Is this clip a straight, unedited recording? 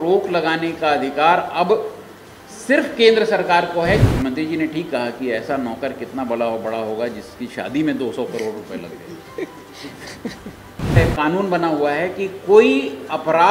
no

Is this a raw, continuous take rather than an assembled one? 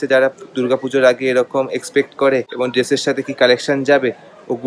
yes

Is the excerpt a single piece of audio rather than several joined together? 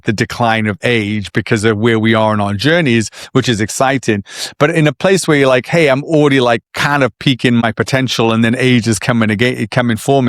no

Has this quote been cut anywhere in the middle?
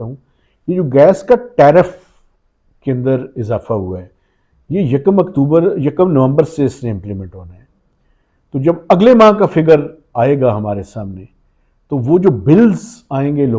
no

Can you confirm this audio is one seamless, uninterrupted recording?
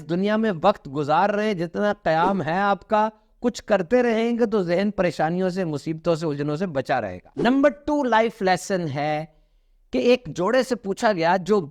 yes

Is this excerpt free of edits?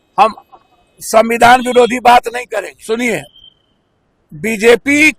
no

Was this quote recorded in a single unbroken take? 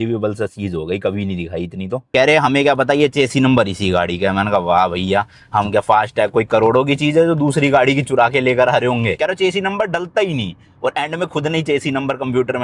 no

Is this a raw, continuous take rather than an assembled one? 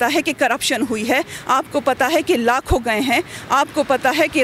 yes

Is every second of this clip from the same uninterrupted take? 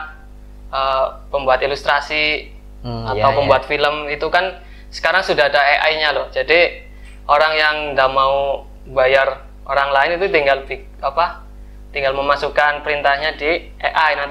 yes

